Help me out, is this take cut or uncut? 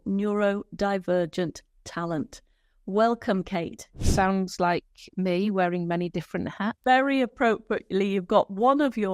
cut